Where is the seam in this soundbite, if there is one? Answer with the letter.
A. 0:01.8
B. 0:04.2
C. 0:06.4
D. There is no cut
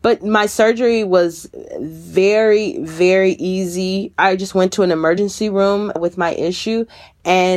B